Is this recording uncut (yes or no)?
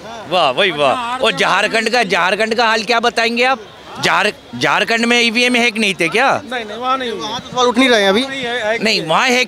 yes